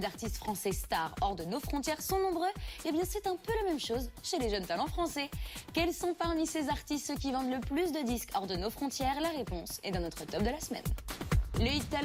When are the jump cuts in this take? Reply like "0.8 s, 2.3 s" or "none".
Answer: none